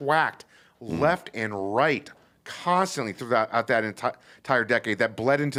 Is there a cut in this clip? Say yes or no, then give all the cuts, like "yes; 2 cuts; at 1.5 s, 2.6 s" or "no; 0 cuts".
no; 0 cuts